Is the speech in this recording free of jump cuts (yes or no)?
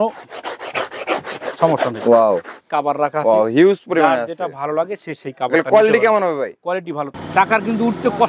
no